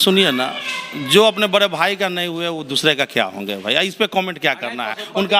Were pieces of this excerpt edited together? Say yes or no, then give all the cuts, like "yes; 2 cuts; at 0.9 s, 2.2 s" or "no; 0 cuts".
no; 0 cuts